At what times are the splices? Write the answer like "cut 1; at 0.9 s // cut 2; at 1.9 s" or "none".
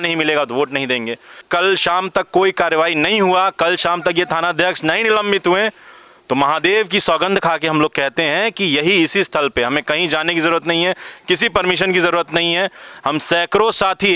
cut 1; at 1.4 s